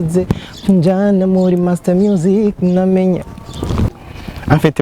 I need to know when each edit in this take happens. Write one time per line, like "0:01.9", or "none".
0:03.9